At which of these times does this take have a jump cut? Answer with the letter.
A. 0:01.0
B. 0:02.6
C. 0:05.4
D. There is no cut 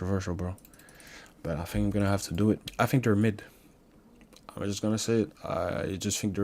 B